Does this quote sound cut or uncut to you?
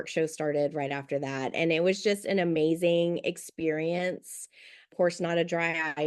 uncut